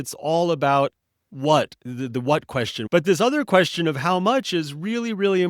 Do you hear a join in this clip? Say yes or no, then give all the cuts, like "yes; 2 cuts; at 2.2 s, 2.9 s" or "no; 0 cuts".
yes; 1 cut; at 2.8 s